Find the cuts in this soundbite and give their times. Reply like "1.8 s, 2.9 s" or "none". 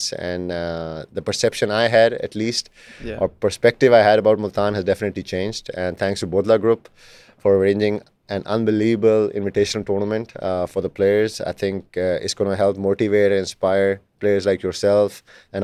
none

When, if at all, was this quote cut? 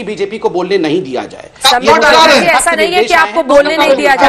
none

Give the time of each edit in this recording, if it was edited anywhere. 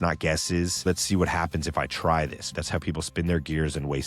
0.8 s, 2.5 s

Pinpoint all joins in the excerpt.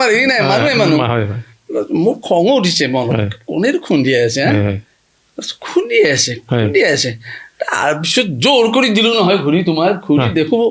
none

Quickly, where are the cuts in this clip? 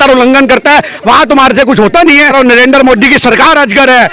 2.3 s

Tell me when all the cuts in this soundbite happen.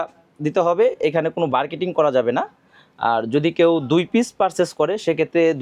none

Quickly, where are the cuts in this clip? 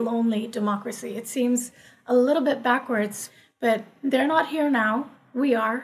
3.2 s

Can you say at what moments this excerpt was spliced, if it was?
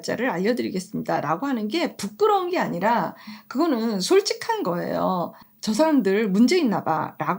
none

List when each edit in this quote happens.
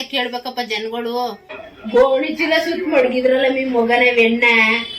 1.6 s

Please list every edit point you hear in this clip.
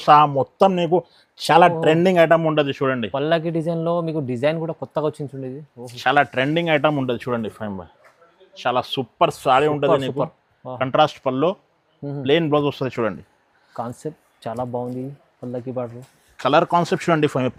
none

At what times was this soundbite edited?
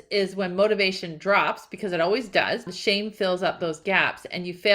2.6 s

